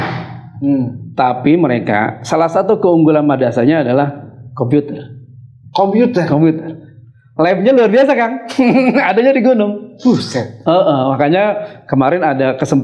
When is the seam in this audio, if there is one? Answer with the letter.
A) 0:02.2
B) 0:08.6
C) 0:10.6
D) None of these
D